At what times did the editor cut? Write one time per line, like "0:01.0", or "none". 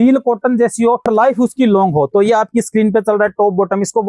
0:01.1